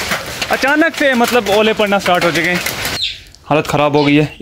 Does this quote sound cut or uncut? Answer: cut